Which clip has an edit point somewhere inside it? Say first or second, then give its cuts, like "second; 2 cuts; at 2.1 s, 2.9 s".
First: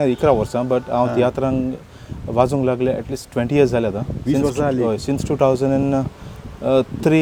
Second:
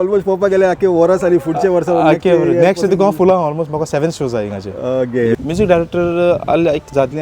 second; 1 cut; at 5.4 s